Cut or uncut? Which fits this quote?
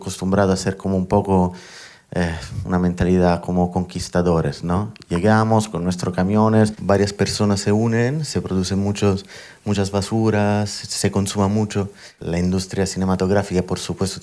cut